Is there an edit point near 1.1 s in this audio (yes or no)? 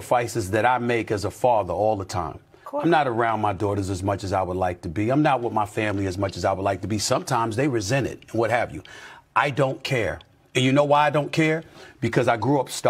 yes